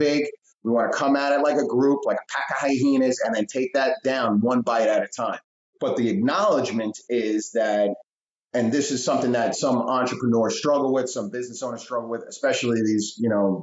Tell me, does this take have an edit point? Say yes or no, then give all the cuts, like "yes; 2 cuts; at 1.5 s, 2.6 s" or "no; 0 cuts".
yes; 1 cut; at 5.7 s